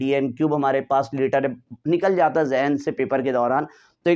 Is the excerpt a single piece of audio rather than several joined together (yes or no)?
yes